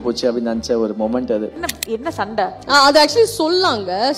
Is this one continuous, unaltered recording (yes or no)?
no